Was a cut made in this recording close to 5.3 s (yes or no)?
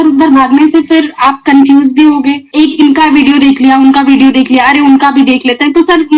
no